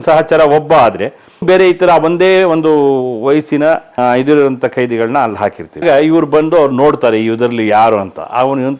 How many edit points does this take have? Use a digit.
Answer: 3